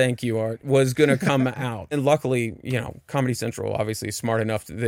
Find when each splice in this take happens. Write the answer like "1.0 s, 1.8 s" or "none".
2.0 s